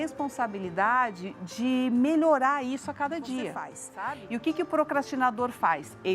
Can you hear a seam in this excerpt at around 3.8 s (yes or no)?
yes